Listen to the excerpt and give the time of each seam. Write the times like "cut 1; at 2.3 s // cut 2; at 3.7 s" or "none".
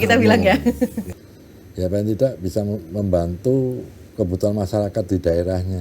cut 1; at 1.1 s